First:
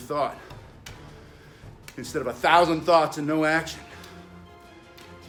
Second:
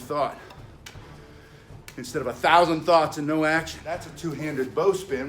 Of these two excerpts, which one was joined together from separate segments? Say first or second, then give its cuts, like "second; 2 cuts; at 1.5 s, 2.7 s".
second; 1 cut; at 4.1 s